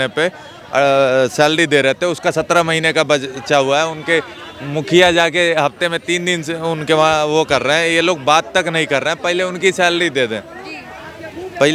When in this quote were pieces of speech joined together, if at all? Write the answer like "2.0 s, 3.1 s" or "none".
none